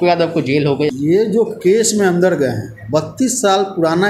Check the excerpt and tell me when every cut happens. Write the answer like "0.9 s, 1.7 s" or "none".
0.9 s